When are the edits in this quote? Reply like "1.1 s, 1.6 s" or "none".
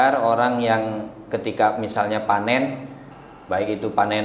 1.2 s